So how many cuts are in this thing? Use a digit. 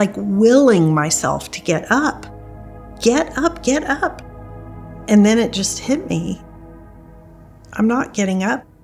0